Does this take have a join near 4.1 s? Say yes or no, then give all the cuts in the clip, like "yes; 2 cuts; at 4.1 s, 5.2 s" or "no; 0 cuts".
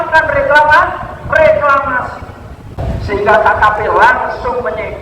no; 1 cut; at 2.8 s